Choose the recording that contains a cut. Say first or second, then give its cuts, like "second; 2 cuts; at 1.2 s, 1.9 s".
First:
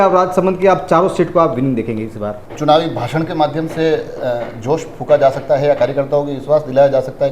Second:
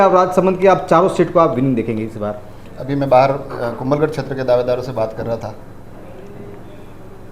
first; 1 cut; at 2.4 s